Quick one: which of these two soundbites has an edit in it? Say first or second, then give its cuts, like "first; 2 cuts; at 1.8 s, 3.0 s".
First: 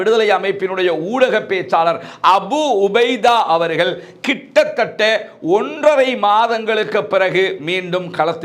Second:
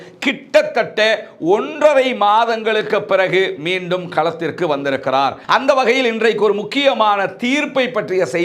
second; 1 cut; at 5.4 s